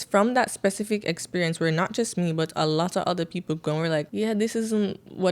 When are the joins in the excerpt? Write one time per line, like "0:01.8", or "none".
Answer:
0:04.1